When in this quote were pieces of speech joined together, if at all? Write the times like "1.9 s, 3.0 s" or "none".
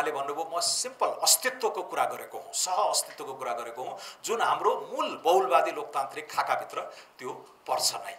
none